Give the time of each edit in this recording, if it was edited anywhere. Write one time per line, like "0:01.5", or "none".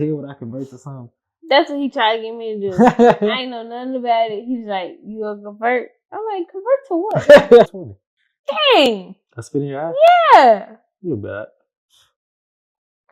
0:07.7